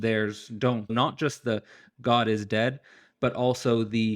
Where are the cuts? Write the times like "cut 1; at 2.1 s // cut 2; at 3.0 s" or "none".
cut 1; at 0.9 s